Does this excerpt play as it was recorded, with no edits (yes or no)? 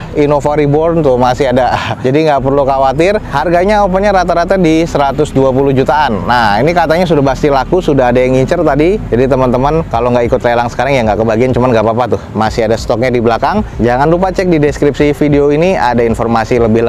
yes